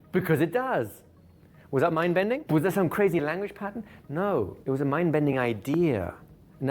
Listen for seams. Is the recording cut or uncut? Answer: cut